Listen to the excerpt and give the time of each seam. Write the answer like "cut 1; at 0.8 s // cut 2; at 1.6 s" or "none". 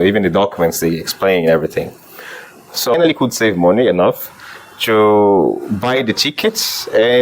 cut 1; at 2.9 s